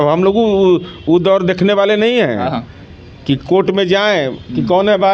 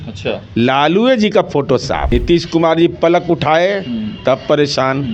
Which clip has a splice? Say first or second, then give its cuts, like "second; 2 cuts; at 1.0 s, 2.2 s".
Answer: second; 1 cut; at 2.0 s